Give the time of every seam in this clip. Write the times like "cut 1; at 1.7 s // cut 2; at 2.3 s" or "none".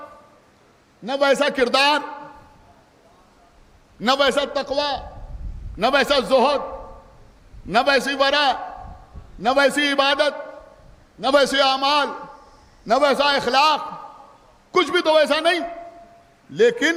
none